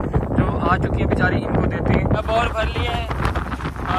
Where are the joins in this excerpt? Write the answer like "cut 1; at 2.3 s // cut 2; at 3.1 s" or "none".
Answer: cut 1; at 2.2 s